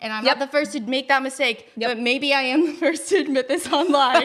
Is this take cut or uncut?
uncut